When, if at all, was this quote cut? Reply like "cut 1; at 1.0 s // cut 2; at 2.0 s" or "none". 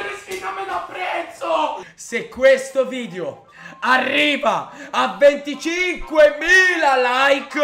cut 1; at 1.9 s